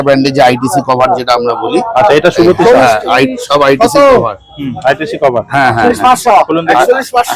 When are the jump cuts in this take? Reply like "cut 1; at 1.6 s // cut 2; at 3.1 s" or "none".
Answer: none